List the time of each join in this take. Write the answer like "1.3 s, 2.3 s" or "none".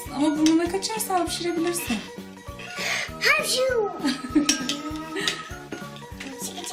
1.8 s